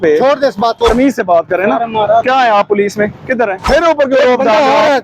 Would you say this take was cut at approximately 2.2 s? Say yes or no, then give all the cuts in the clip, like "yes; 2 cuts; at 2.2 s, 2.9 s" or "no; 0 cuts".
no; 2 cuts; at 0.9 s, 3.6 s